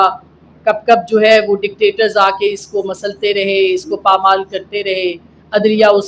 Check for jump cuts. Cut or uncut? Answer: uncut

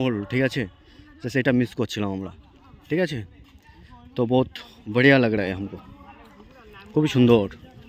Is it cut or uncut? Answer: uncut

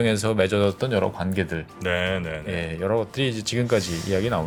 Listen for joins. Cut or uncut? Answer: uncut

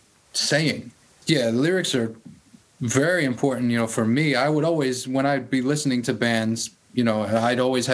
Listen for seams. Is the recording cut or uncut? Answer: cut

